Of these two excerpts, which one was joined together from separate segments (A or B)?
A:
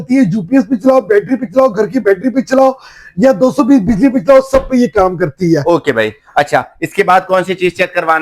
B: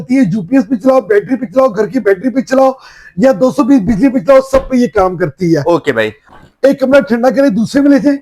B